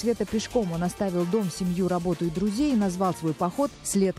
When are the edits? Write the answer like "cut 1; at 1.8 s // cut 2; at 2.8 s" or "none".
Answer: none